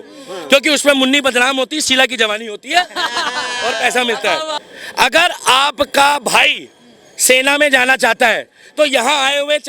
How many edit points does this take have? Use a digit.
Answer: 1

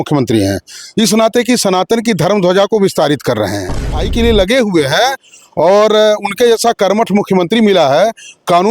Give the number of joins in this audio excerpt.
1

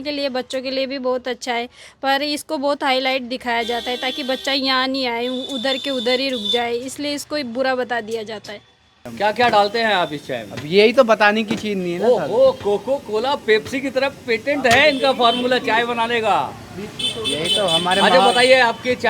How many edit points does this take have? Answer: 1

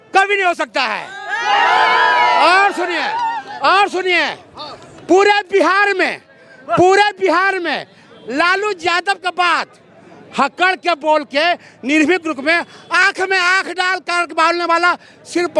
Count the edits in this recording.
0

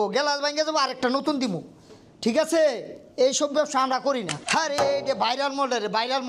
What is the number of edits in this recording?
1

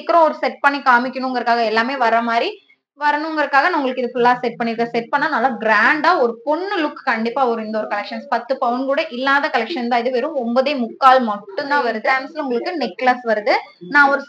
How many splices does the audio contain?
1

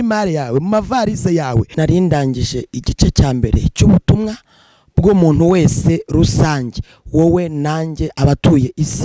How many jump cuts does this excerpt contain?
1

